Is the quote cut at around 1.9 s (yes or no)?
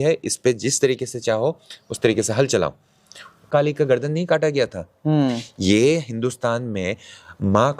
no